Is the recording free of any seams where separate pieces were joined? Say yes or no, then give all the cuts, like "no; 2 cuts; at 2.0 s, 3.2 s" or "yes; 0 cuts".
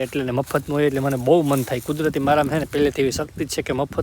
yes; 0 cuts